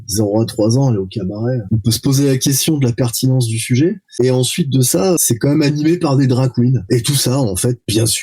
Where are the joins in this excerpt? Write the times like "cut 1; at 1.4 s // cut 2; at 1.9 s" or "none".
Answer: cut 1; at 1.6 s // cut 2; at 5.2 s // cut 3; at 6.8 s